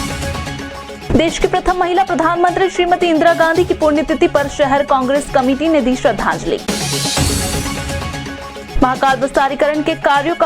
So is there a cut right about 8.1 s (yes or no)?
no